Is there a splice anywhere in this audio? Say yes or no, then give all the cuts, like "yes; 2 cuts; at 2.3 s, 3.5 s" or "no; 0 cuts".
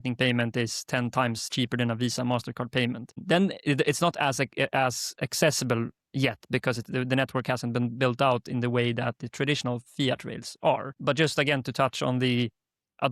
yes; 2 cuts; at 3.2 s, 11.0 s